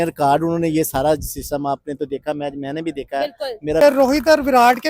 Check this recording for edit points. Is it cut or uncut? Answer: cut